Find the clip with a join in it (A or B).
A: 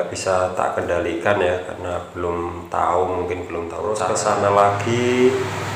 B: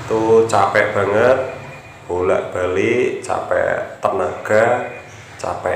A